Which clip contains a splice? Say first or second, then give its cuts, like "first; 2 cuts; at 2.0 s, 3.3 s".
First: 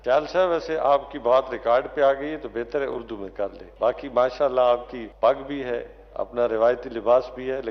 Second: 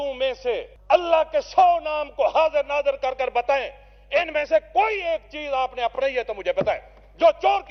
first; 2 cuts; at 3.6 s, 5.0 s